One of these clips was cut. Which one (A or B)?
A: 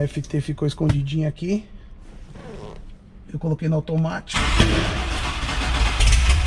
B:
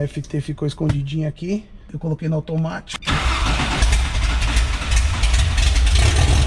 B